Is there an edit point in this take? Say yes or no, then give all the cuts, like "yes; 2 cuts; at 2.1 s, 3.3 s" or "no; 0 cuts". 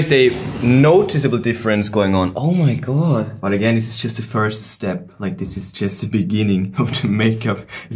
yes; 3 cuts; at 2.3 s, 3.3 s, 6.7 s